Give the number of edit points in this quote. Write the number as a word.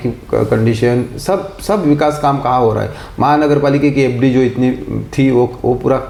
zero